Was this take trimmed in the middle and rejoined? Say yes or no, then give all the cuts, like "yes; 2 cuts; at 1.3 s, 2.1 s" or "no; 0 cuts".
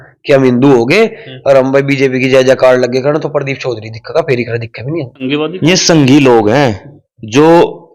yes; 1 cut; at 5.3 s